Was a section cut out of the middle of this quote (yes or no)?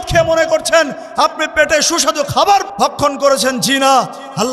yes